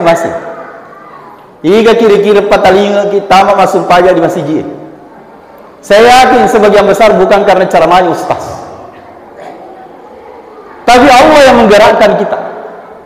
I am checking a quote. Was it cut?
no; 0 cuts

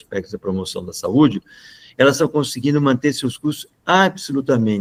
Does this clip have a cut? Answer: no; 0 cuts

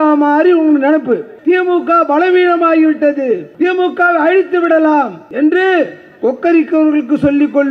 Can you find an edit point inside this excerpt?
yes; 3 cuts; at 1.3 s, 3.5 s, 5.2 s

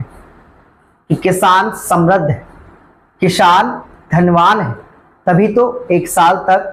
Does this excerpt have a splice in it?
no; 0 cuts

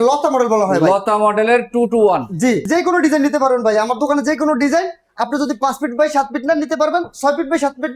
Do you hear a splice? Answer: yes; 1 cut; at 2.6 s

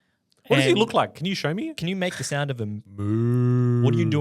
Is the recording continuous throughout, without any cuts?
no; 1 cut; at 1.8 s

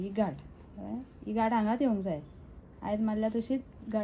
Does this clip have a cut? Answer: no; 0 cuts

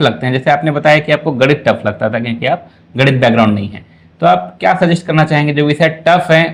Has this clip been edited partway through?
no; 0 cuts

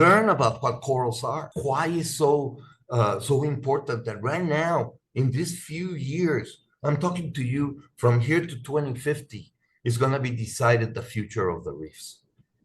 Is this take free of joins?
no; 1 cut; at 1.5 s

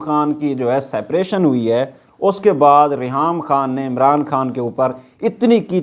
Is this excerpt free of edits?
yes; 0 cuts

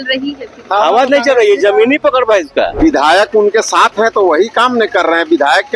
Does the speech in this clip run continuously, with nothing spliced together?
no; 1 cut; at 2.7 s

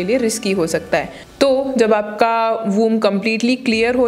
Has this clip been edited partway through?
no; 0 cuts

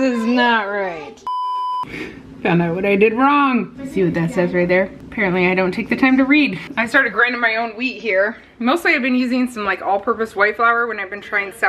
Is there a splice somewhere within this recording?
no; 0 cuts

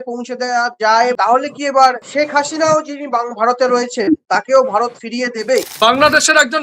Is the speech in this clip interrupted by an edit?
yes; 4 cuts; at 1.2 s, 2.0 s, 4.2 s, 5.7 s

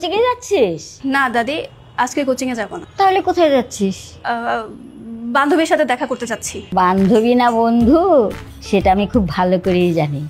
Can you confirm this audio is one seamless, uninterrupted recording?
no; 4 cuts; at 0.9 s, 2.8 s, 4.1 s, 6.5 s

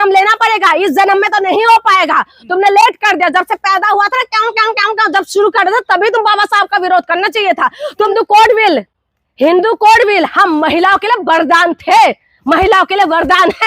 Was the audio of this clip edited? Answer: yes; 1 cut; at 8.1 s

